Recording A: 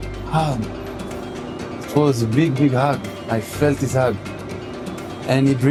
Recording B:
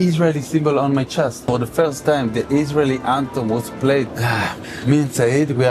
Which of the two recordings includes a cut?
B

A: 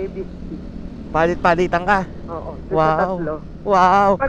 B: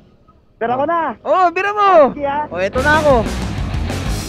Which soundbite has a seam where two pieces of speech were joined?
B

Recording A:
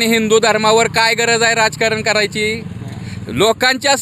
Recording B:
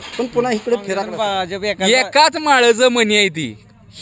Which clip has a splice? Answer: B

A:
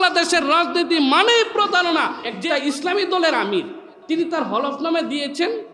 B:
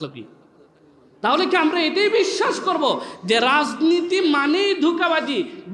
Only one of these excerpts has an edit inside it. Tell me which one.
A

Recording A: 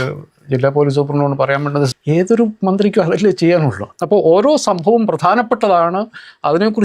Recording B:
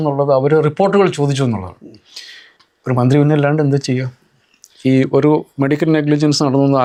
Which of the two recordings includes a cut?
A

